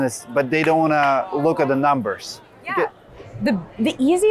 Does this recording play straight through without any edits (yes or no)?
yes